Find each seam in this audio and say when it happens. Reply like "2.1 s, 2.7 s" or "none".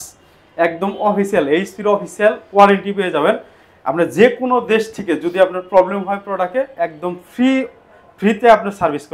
none